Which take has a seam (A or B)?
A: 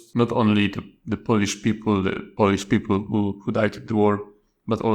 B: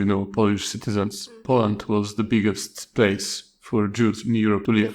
B